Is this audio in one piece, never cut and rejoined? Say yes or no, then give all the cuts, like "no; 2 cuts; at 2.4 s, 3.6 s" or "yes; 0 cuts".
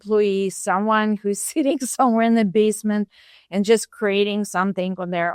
yes; 0 cuts